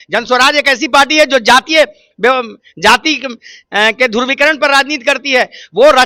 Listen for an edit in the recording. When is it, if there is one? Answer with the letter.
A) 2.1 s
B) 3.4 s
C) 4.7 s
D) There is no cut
D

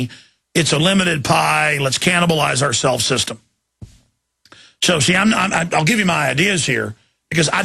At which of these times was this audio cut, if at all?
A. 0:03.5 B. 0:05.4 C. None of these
C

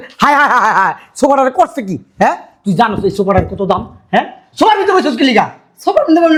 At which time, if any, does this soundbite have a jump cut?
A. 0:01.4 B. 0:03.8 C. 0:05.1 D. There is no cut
D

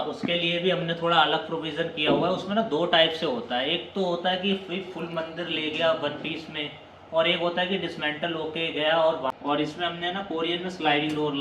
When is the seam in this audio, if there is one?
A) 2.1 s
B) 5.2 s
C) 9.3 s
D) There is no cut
C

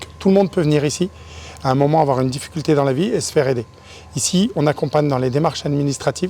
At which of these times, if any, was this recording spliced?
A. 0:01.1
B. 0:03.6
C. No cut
C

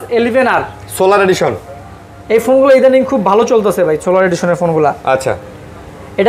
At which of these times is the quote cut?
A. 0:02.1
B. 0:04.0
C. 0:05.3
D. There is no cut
D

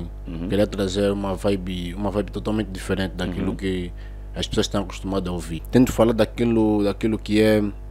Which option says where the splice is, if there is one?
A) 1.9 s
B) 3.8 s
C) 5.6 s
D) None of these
C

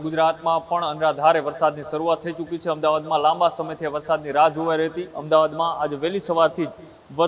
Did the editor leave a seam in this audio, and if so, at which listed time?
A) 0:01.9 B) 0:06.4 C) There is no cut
C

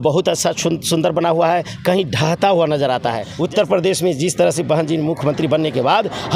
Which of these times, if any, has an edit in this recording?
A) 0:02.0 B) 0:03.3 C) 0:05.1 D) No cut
B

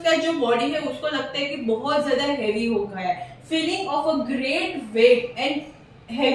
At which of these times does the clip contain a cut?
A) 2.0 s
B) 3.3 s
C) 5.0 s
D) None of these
D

